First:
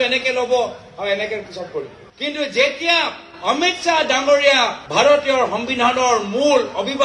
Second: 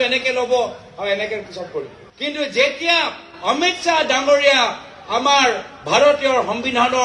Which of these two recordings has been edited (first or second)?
first